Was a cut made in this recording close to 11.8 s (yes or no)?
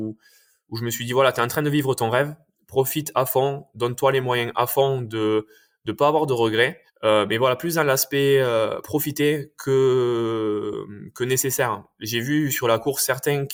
no